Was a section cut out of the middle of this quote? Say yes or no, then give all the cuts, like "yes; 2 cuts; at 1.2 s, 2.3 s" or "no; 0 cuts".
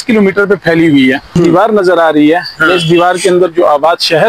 yes; 1 cut; at 1.4 s